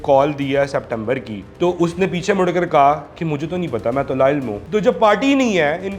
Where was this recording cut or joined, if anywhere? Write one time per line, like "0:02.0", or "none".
0:04.6